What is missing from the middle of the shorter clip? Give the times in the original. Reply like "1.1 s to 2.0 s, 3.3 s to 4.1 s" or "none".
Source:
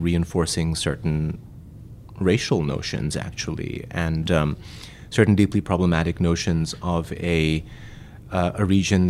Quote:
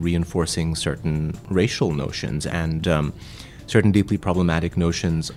1.4 s to 2.1 s, 3.2 s to 3.9 s